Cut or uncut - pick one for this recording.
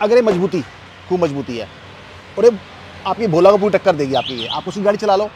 uncut